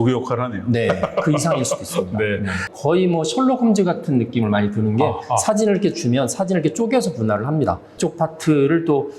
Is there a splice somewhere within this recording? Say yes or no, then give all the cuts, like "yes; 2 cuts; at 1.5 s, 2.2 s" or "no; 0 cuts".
yes; 2 cuts; at 2.7 s, 8.0 s